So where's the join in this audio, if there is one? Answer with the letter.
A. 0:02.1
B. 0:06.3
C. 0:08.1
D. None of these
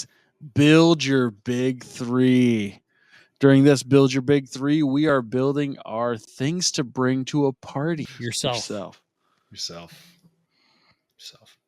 C